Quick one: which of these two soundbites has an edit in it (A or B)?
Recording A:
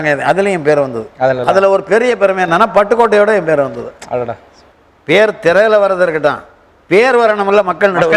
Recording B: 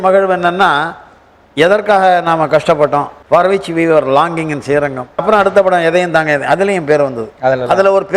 B